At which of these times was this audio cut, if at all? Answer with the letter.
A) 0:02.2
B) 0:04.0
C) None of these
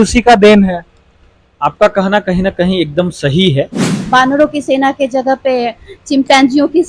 B